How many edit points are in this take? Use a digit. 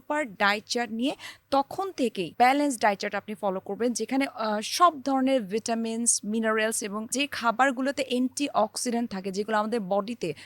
2